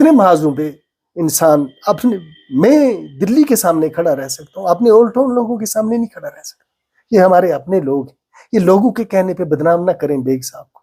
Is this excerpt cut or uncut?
uncut